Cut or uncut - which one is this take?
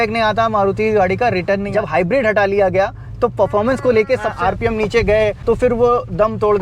cut